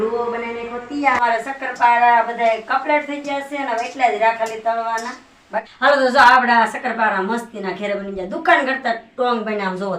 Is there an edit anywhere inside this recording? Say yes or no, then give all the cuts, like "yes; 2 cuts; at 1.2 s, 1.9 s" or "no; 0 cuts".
yes; 2 cuts; at 1.2 s, 5.7 s